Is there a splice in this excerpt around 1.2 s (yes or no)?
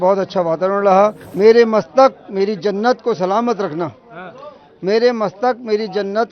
yes